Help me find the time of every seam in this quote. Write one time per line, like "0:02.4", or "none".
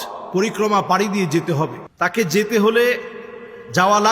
0:01.8